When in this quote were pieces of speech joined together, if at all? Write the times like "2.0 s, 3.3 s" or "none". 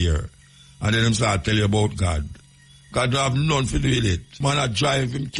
4.3 s